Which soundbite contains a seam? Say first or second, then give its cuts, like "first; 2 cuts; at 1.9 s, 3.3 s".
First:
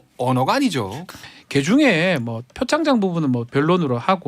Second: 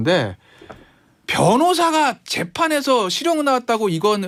first; 1 cut; at 1.0 s